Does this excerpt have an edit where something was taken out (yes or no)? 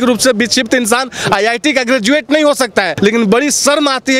yes